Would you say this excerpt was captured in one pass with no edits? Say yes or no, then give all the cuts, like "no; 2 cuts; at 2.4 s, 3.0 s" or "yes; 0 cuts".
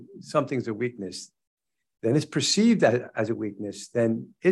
yes; 0 cuts